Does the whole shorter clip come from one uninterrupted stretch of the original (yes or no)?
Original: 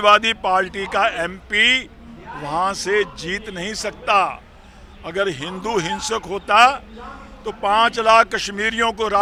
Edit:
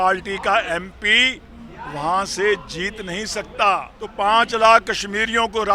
no